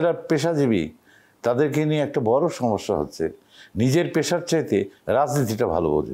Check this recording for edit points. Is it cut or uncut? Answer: uncut